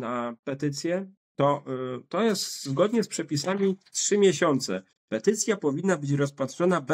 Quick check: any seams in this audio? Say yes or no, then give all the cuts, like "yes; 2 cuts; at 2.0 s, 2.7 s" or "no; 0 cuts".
no; 0 cuts